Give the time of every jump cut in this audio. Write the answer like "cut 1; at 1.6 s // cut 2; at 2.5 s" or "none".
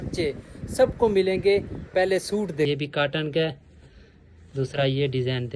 cut 1; at 2.7 s